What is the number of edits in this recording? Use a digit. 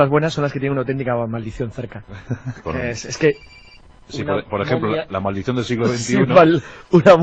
1